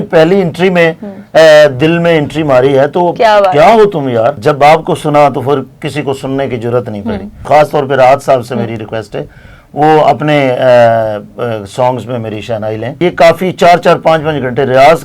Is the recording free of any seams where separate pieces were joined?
no; 3 cuts; at 4.4 s, 7.4 s, 13.0 s

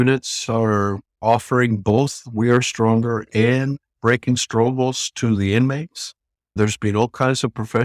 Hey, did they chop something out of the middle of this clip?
no; 0 cuts

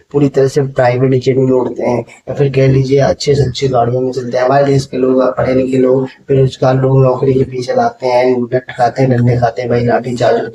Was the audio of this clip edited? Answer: no; 0 cuts

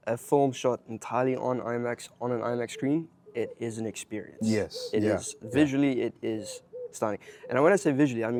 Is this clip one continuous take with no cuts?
yes; 0 cuts

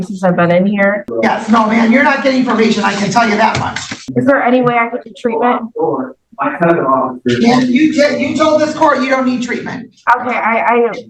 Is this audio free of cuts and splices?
no; 2 cuts; at 1.1 s, 4.1 s

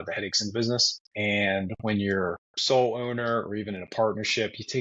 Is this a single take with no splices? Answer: no; 2 cuts; at 1.0 s, 2.5 s

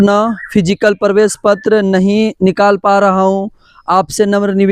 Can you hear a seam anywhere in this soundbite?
no; 0 cuts

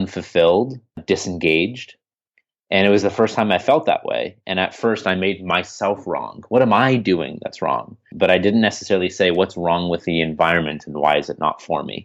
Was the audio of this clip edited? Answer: yes; 2 cuts; at 1.0 s, 8.1 s

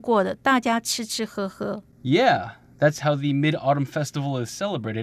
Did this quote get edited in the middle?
yes; 1 cut; at 1.9 s

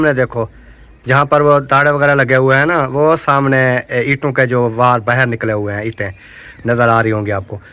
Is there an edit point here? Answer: no; 0 cuts

